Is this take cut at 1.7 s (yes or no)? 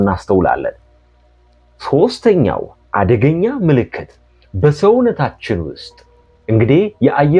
no